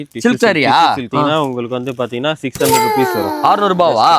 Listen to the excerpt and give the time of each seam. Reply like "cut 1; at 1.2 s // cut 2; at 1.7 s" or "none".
cut 1; at 1.1 s